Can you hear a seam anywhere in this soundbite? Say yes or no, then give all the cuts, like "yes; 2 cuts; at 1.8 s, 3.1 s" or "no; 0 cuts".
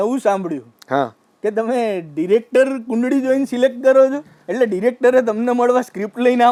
no; 0 cuts